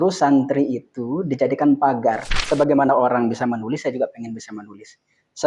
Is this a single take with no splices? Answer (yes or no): no